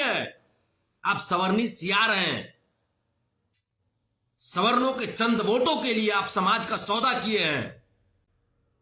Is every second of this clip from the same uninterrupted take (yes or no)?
yes